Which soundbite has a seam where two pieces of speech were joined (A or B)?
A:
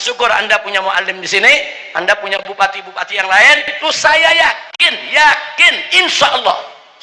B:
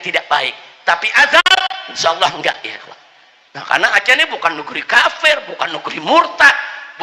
A